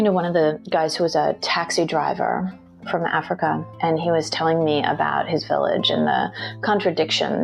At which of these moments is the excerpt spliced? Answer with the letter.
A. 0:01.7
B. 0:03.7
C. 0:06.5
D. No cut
B